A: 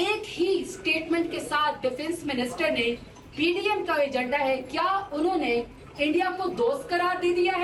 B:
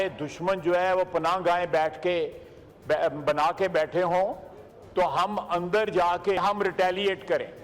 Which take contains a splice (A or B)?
B